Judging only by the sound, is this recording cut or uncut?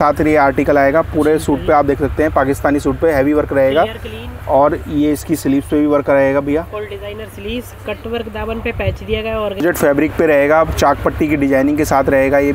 cut